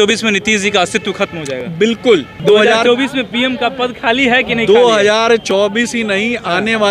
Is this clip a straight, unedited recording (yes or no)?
no